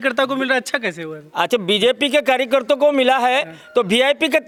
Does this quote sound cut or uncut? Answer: uncut